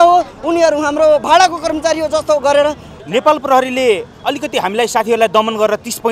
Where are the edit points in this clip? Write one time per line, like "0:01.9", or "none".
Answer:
0:02.9